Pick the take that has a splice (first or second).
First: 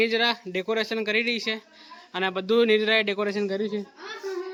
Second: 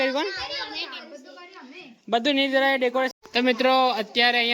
second